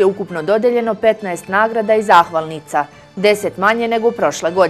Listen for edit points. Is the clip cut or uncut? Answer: uncut